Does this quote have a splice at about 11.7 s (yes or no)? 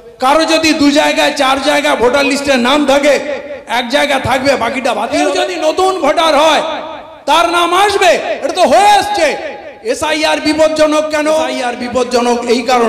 yes